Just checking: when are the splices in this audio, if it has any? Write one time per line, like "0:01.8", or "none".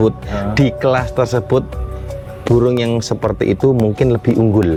none